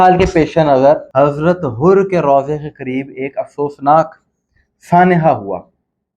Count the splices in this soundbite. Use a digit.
1